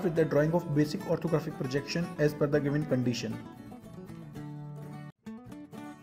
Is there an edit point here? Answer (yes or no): yes